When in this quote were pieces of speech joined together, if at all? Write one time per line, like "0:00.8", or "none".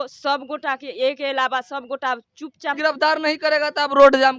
0:02.8